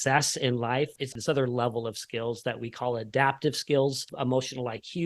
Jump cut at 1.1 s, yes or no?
yes